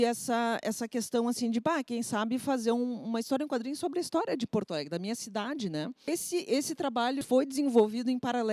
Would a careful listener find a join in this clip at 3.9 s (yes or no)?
no